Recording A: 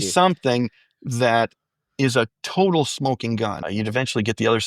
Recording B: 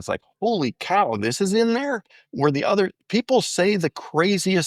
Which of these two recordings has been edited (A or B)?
A